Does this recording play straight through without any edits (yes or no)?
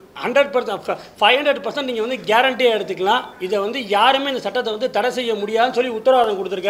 yes